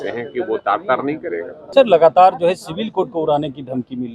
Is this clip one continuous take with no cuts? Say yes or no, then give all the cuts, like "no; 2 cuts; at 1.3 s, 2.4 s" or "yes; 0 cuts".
no; 1 cut; at 1.6 s